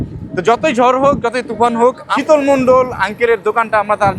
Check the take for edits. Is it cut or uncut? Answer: cut